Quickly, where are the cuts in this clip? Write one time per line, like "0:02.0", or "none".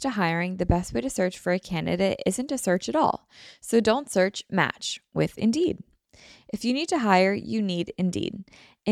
none